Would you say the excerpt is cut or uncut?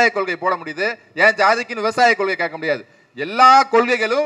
uncut